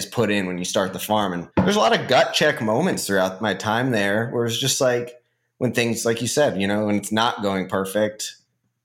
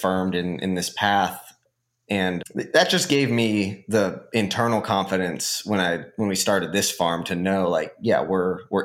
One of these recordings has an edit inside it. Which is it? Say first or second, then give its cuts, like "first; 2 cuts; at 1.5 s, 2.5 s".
first; 1 cut; at 1.4 s